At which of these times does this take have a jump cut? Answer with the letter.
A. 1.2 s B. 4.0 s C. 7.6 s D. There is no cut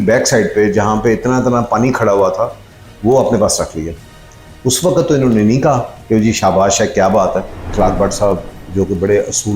C